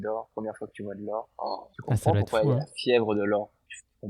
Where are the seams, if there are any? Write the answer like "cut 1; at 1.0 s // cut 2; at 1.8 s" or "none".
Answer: cut 1; at 1.7 s